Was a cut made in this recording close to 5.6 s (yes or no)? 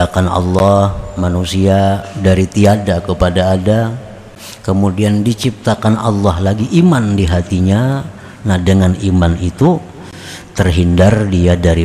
no